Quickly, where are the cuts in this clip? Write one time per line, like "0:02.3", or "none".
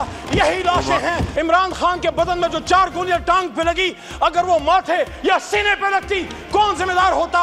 0:01.3